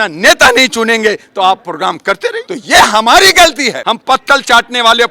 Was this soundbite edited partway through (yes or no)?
yes